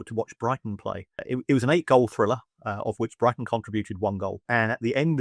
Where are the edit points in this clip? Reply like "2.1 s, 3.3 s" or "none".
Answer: 1.2 s, 4.4 s